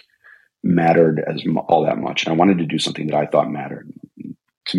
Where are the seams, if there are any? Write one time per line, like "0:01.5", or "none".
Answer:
none